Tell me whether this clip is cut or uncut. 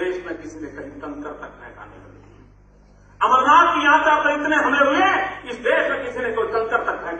cut